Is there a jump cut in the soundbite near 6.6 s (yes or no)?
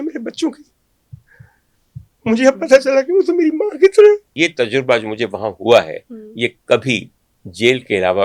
no